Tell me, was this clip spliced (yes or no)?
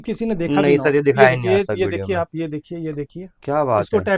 no